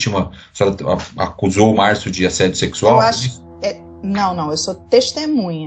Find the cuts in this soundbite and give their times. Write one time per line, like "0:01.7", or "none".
none